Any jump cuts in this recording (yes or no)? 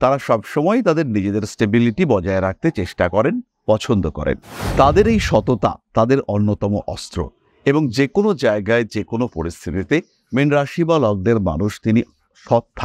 no